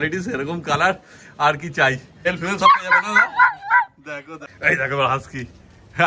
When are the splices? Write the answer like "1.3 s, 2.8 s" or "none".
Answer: 2.3 s, 4.4 s